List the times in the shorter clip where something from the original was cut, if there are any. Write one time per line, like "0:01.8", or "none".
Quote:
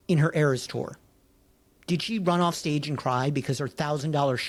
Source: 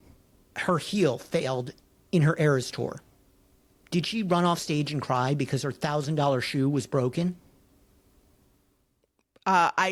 none